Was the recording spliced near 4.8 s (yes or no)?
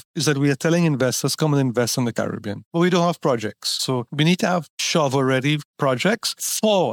yes